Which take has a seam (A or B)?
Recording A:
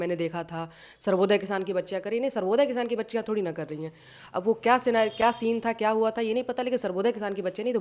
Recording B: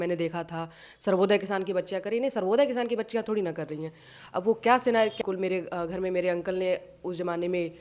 B